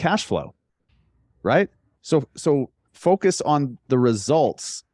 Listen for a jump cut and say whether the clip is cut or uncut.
uncut